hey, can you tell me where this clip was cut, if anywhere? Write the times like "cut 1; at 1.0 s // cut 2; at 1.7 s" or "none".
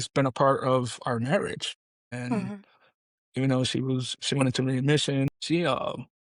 none

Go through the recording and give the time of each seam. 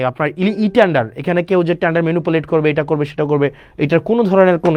none

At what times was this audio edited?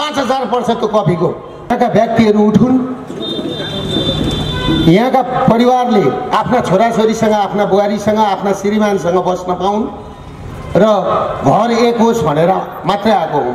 cut 1; at 1.7 s

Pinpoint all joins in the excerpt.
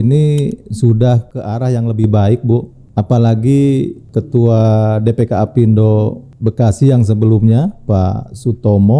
cut 1; at 1.4 s // cut 2; at 2.8 s // cut 3; at 4.0 s // cut 4; at 6.3 s

